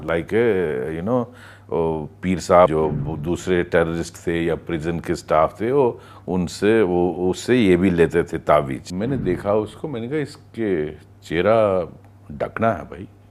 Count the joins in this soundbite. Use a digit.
2